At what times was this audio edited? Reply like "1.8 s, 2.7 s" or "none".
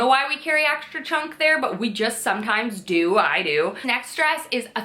3.8 s